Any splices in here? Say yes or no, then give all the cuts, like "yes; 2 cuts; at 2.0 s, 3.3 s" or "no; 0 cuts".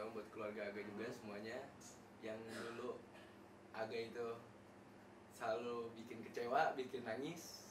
no; 0 cuts